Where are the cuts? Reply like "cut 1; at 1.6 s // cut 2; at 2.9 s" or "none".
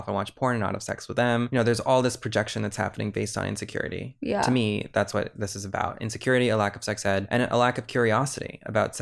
cut 1; at 1.5 s // cut 2; at 7.2 s